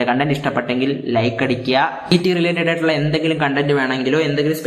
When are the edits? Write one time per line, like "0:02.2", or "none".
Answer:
0:02.0